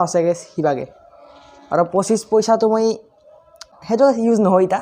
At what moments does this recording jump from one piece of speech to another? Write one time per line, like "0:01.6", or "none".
0:03.6